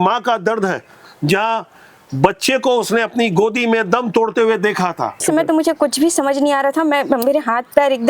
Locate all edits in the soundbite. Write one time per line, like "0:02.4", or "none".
0:05.2